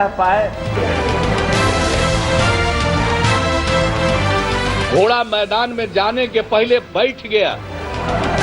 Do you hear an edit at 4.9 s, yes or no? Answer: no